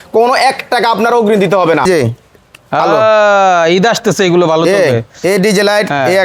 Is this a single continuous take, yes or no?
no